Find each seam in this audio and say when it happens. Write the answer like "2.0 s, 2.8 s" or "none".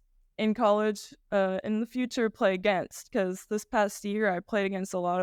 none